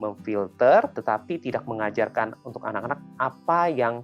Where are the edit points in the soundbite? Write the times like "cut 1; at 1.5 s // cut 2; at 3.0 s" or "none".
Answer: cut 1; at 0.9 s